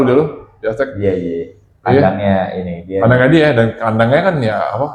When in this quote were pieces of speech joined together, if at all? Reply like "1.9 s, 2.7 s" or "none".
none